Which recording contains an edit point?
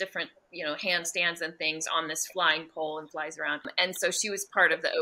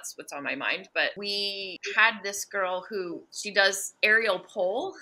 second; 2 cuts; at 1.7 s, 3.3 s

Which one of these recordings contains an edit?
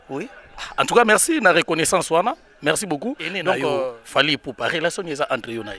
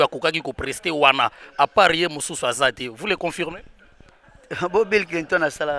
first; 1 cut; at 3.9 s

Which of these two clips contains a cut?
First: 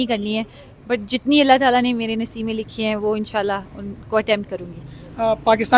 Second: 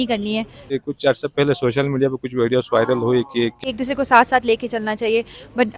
second; 2 cuts; at 0.8 s, 3.6 s

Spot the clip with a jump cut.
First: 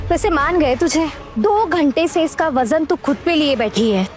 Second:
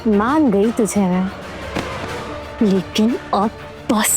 second; 1 cut; at 2.0 s

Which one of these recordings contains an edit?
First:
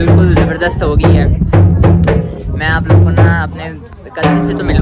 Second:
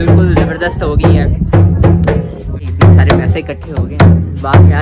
second; 1 cut; at 2.7 s

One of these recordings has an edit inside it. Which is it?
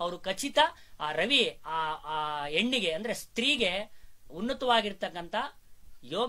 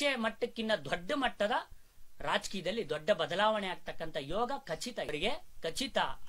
second; 1 cut; at 5.1 s

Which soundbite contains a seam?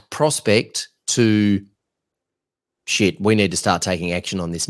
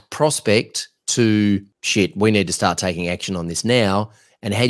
second; 1 cut; at 1.8 s

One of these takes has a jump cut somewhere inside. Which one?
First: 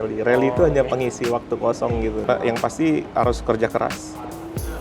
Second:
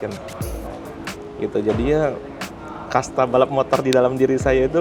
first; 1 cut; at 2.2 s

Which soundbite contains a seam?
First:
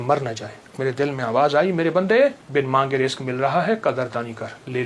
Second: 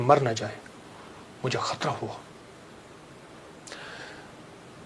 first; 2 cuts; at 0.8 s, 2.4 s

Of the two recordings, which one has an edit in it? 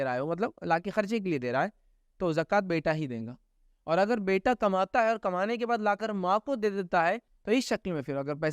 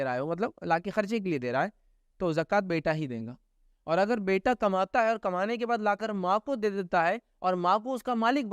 first; 1 cut; at 7.3 s

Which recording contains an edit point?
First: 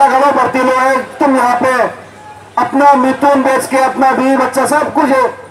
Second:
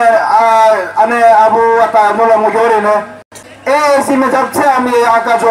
second; 1 cut; at 3.4 s

